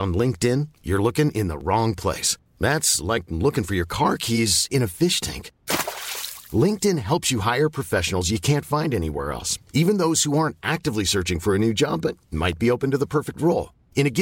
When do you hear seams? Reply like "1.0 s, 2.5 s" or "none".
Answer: none